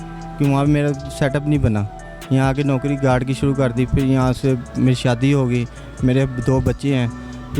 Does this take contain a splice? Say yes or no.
no